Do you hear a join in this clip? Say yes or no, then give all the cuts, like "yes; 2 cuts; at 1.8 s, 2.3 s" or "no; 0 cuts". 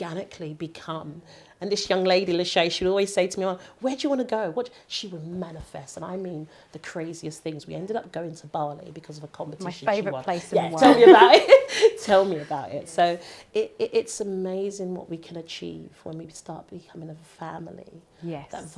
no; 0 cuts